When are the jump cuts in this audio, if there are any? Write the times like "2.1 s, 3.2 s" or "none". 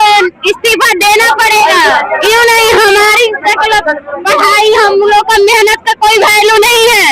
2.2 s